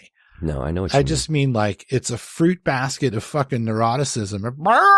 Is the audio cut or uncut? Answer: uncut